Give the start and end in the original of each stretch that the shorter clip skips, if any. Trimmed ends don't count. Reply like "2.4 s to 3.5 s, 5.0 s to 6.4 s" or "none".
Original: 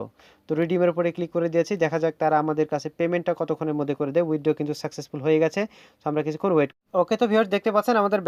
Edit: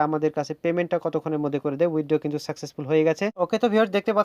5.7 s to 6.9 s